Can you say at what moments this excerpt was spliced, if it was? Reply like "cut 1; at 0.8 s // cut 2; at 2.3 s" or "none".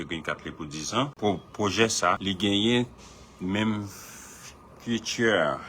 cut 1; at 1.1 s // cut 2; at 2.2 s